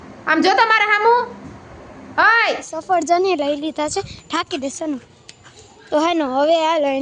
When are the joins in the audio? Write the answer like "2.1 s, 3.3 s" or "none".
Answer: 2.7 s